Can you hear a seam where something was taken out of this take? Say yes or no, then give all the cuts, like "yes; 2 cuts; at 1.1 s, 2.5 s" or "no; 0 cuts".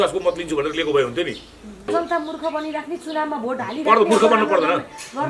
yes; 1 cut; at 1.9 s